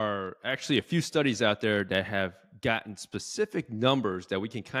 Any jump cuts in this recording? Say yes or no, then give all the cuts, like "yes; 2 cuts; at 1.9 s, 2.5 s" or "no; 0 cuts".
no; 0 cuts